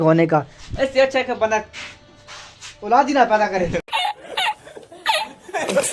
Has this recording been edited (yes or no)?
no